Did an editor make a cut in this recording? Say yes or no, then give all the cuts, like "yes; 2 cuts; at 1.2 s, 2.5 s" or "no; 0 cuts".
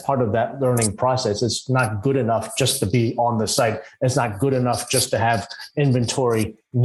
no; 0 cuts